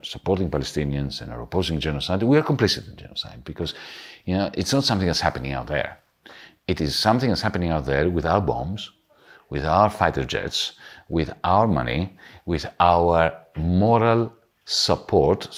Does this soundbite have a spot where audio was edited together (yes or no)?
no